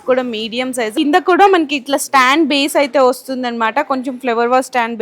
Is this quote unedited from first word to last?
no; 1 cut; at 0.9 s

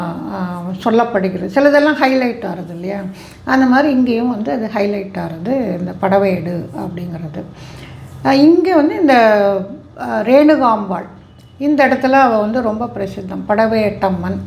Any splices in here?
no; 0 cuts

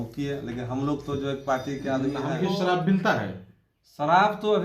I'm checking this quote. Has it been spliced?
yes; 1 cut; at 2.3 s

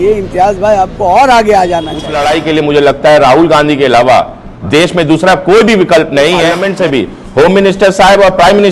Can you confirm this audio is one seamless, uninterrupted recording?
no; 2 cuts; at 2.1 s, 6.6 s

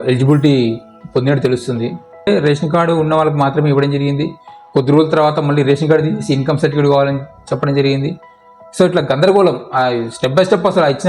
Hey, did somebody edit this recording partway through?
yes; 1 cut; at 2.3 s

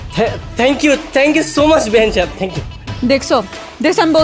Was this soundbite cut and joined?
no; 0 cuts

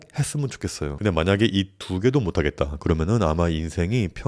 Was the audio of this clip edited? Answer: yes; 1 cut; at 0.9 s

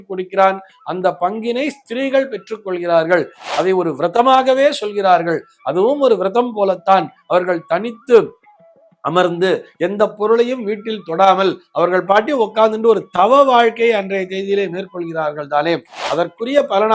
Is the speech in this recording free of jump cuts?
no; 1 cut; at 3.4 s

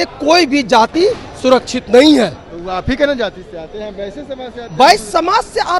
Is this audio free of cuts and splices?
yes; 0 cuts

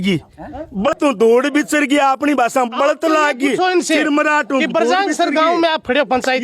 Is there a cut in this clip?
yes; 1 cut; at 0.9 s

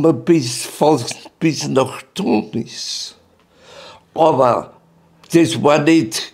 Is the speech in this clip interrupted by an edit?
yes; 1 cut; at 5.2 s

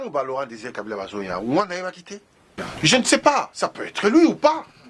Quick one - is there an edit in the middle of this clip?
yes; 1 cut; at 2.6 s

